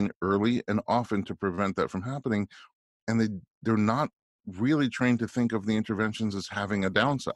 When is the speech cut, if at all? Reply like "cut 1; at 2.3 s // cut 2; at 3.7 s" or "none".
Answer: none